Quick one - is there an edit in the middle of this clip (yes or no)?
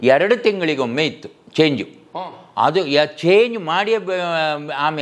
no